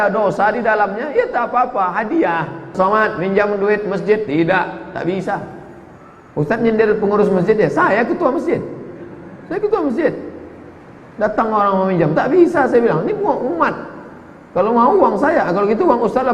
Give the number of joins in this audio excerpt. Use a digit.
1